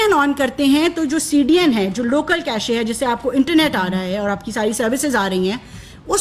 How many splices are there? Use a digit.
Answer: 0